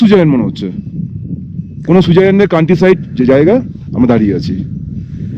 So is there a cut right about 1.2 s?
no; 0 cuts

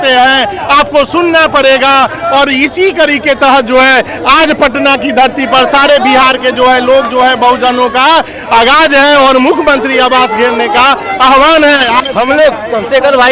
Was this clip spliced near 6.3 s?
no; 1 cut; at 12.1 s

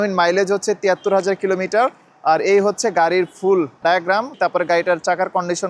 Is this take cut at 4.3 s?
yes; 1 cut; at 4.3 s

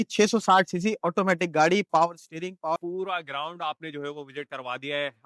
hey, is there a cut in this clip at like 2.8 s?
yes; 1 cut; at 2.8 s

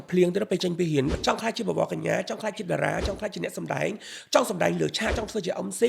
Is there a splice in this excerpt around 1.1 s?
yes; 1 cut; at 1.1 s

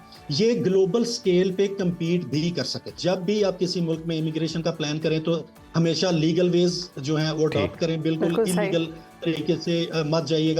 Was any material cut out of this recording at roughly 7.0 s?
no; 1 cut; at 3.0 s

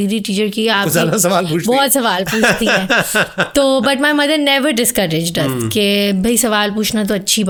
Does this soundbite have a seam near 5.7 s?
no; 0 cuts

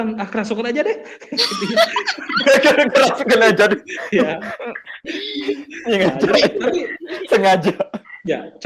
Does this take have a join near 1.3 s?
no; 0 cuts

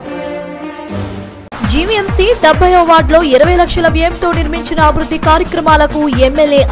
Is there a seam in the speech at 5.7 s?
no; 1 cut; at 1.1 s

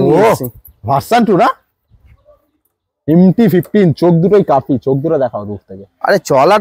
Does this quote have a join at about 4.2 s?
no; 0 cuts

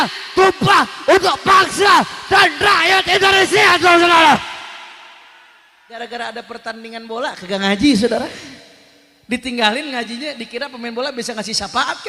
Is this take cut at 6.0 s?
yes; 1 cut; at 6.0 s

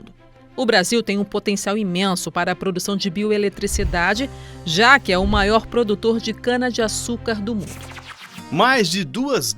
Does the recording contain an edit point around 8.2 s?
yes; 1 cut; at 8.2 s

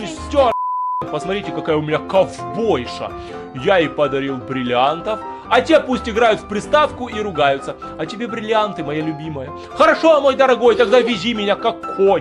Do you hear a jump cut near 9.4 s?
no; 1 cut; at 1.0 s

